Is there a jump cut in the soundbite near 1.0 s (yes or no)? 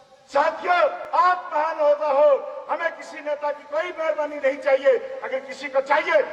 yes